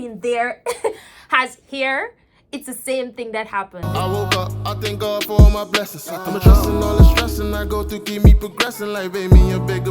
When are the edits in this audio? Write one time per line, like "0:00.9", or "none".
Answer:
0:03.9